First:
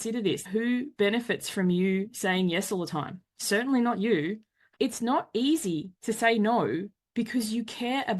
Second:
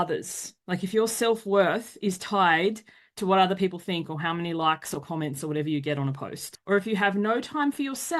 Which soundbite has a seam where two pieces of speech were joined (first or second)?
first